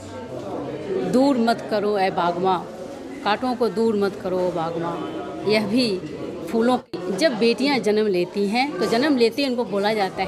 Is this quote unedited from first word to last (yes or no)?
no